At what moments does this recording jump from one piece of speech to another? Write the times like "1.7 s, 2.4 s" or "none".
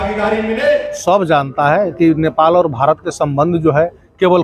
1.0 s